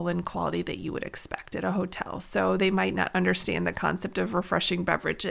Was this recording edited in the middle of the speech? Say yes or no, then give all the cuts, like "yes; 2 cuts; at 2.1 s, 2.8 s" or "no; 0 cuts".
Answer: no; 0 cuts